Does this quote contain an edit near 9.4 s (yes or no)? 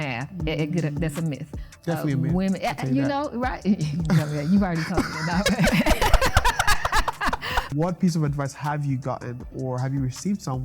no